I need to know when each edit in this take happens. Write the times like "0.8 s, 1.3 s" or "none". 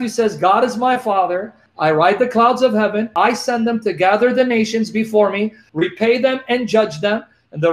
1.6 s, 3.1 s, 5.6 s